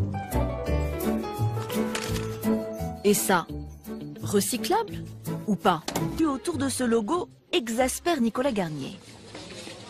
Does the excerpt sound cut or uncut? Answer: uncut